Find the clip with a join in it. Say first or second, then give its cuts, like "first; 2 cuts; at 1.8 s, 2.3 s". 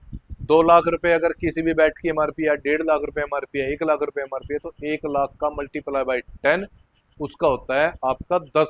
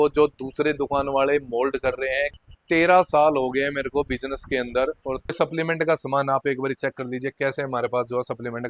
second; 2 cuts; at 2.3 s, 5.3 s